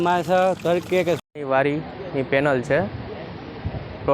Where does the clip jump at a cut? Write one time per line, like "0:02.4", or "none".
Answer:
0:01.2

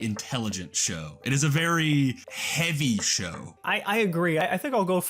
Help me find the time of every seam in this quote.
0:02.3
0:03.6
0:04.4

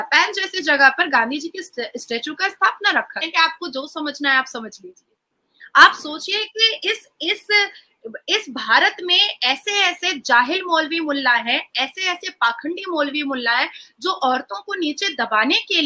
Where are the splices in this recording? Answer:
0:03.3

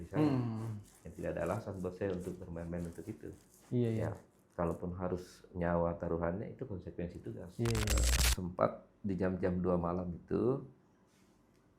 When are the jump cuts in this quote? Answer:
0:08.0

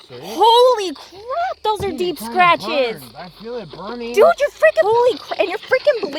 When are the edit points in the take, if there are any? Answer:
0:04.8

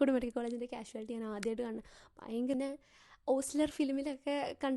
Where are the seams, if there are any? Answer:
0:02.5

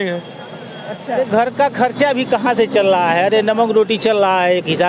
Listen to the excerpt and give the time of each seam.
0:01.1

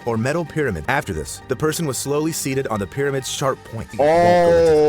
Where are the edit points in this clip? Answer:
0:01.1
0:03.9

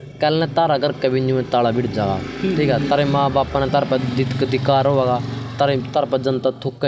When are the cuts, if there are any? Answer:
none

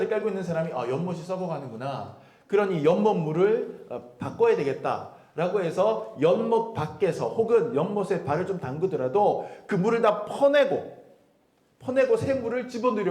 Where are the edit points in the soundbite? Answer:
none

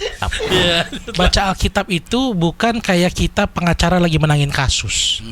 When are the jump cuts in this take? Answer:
0:01.0

